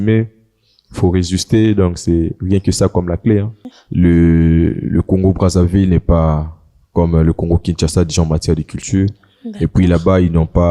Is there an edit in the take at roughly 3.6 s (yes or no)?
yes